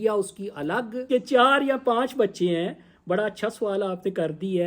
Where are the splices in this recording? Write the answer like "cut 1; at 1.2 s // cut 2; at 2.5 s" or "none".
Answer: cut 1; at 1.0 s